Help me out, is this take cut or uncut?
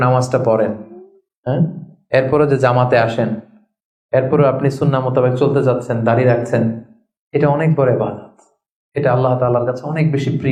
uncut